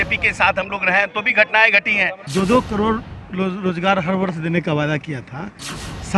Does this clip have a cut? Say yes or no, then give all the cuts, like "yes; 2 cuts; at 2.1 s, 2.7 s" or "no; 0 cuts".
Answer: yes; 1 cut; at 2.2 s